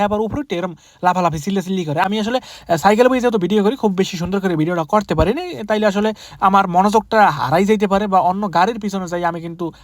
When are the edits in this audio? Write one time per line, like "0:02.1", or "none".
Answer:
0:02.0